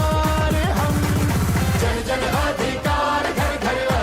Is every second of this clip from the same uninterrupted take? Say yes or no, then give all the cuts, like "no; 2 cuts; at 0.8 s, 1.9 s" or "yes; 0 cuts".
yes; 0 cuts